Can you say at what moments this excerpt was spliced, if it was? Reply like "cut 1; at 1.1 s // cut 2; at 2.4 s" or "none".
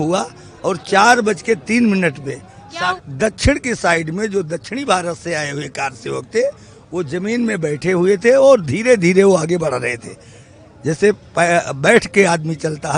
cut 1; at 3.0 s